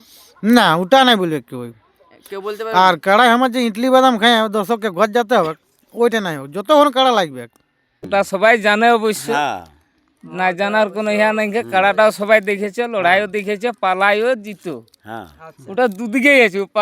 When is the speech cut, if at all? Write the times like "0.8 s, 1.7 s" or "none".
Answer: 8.0 s